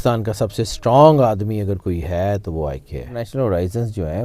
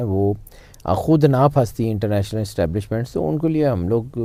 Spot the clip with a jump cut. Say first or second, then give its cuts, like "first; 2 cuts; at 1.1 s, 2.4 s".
first; 1 cut; at 3.2 s